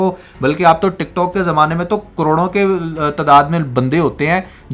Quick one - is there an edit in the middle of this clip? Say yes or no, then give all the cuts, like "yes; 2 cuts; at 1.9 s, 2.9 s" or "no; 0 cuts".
no; 0 cuts